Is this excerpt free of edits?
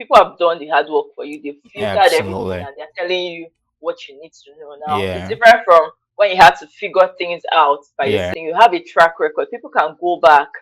no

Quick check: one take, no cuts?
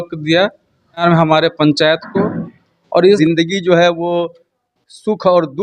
no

